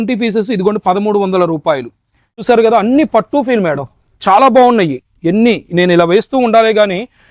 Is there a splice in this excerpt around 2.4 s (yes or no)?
yes